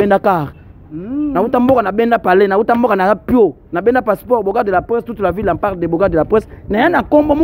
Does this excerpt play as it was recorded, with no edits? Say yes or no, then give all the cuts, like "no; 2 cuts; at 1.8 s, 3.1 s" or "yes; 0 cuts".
yes; 0 cuts